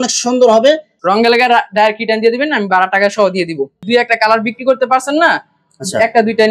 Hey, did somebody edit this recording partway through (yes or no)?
yes